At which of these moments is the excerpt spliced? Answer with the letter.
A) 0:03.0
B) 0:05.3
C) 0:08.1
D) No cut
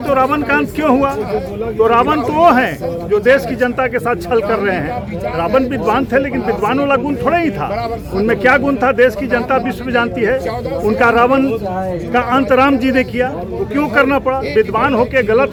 D